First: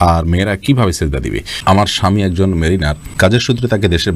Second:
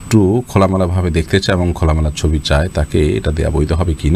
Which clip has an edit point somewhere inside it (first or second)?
first